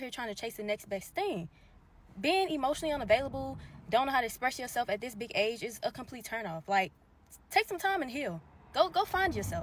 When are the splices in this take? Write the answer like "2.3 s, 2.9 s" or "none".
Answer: none